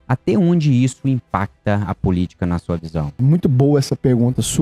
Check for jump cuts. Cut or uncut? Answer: cut